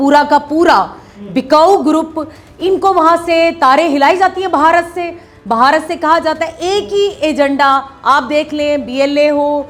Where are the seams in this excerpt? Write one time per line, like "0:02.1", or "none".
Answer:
none